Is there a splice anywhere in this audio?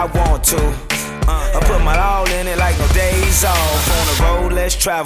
no; 0 cuts

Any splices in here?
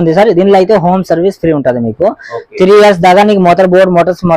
no; 0 cuts

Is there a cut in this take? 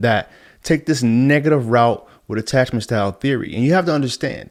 no; 0 cuts

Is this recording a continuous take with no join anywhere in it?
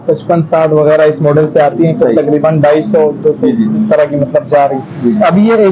yes; 0 cuts

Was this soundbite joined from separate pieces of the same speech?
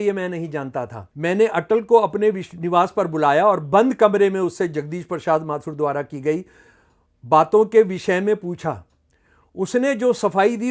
yes; 1 cut; at 1.0 s

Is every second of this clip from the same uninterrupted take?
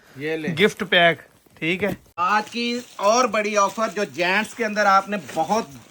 no; 1 cut; at 2.1 s

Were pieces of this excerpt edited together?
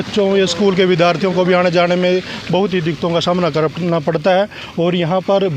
no; 0 cuts

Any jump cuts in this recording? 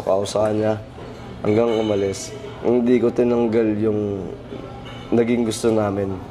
no; 0 cuts

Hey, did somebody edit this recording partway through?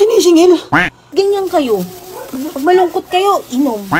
yes; 1 cut; at 1.0 s

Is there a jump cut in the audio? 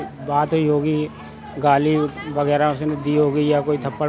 no; 0 cuts

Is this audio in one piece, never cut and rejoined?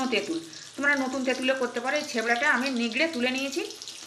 yes; 0 cuts

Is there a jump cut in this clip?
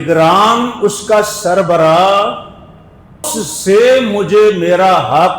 yes; 1 cut; at 3.3 s

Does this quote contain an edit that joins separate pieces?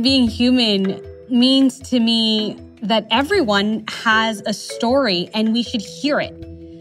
no; 0 cuts

